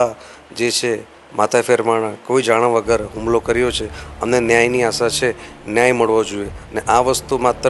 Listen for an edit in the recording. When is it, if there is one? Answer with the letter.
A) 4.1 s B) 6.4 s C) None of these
C